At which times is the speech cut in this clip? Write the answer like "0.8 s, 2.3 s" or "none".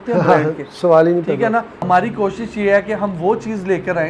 1.7 s